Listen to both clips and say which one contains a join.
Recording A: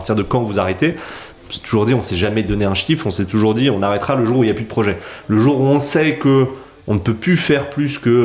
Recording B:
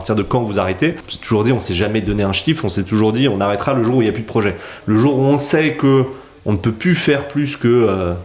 B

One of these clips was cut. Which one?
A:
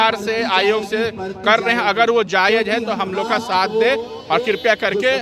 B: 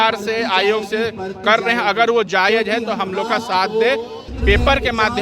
B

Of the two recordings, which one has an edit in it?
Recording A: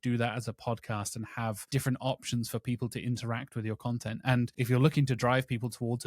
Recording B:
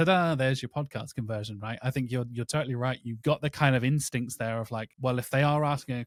A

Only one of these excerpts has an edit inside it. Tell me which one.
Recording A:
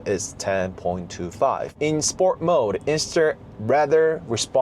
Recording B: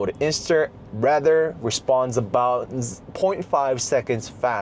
A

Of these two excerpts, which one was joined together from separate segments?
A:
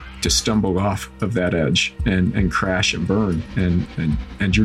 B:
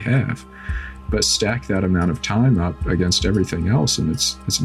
A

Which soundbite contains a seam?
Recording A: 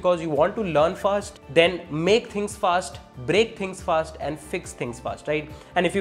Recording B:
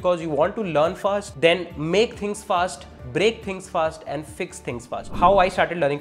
B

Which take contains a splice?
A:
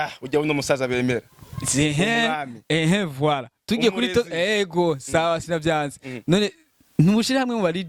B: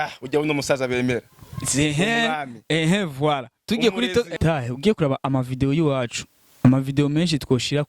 B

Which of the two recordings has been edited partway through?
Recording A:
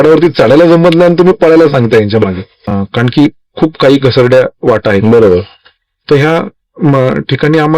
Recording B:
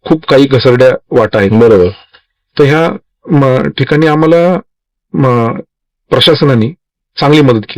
A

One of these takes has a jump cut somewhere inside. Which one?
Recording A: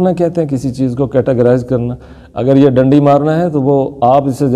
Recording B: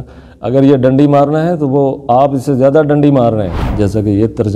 B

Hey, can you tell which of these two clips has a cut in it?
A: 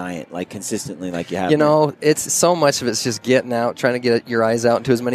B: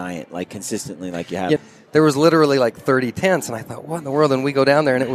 B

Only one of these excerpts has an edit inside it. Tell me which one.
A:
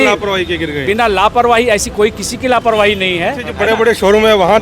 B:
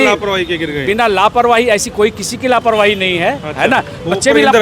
A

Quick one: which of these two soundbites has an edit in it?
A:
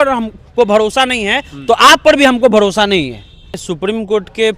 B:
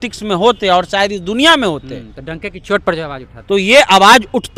A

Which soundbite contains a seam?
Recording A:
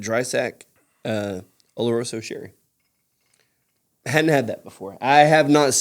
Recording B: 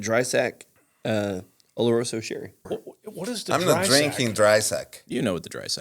B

